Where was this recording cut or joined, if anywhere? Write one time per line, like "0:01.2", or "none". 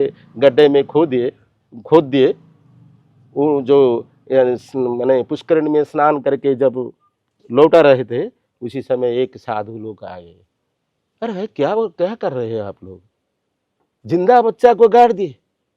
none